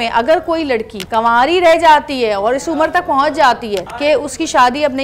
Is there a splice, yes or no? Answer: yes